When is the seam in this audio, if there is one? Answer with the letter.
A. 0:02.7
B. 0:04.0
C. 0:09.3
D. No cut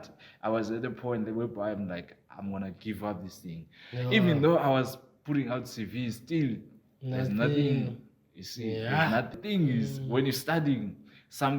C